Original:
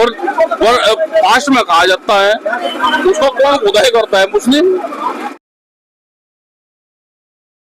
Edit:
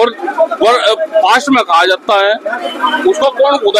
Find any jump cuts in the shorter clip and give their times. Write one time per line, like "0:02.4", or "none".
none

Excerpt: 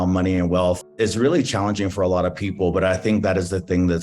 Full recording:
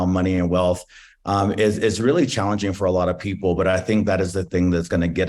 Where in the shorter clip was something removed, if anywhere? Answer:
0:00.9

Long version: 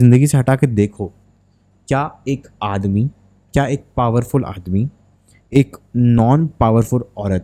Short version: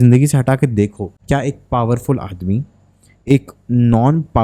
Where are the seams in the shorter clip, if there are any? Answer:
0:01.1

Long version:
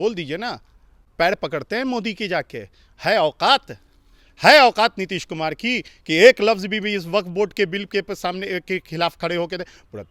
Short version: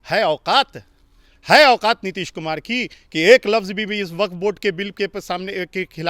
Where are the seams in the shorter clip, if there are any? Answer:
none

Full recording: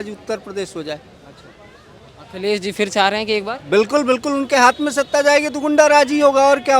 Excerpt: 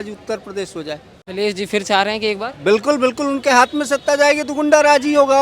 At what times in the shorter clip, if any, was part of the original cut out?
0:01.1

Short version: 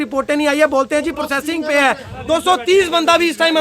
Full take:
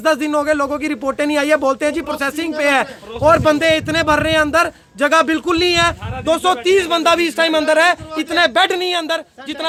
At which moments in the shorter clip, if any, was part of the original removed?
0:02.1

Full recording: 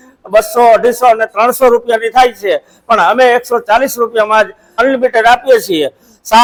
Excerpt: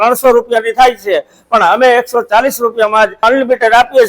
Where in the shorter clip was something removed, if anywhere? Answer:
0:03.2

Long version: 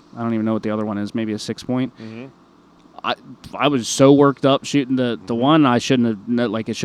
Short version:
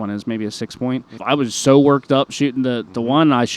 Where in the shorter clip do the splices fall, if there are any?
0:01.1

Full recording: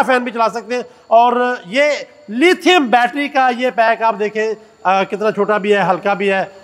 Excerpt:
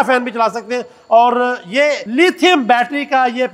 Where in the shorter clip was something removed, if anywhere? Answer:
0:02.0

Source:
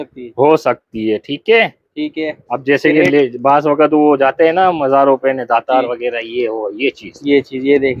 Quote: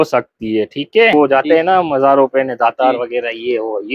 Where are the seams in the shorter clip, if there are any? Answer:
0:01.1

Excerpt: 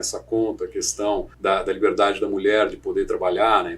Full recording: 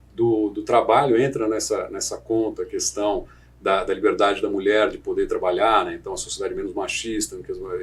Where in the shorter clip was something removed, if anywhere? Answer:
0:01.3

